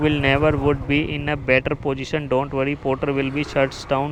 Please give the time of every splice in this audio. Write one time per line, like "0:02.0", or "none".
none